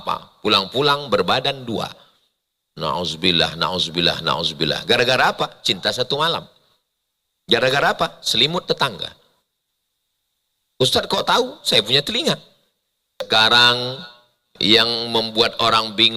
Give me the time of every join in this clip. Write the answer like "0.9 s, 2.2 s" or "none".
13.3 s